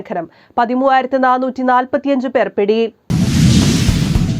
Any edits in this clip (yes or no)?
yes